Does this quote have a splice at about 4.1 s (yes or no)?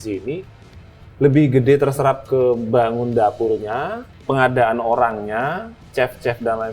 yes